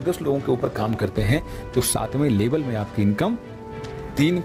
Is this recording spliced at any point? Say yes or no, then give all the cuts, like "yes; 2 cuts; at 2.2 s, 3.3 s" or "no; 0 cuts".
no; 0 cuts